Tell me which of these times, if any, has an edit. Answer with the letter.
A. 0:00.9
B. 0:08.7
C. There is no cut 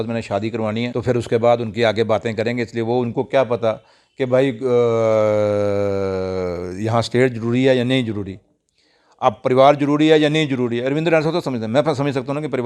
A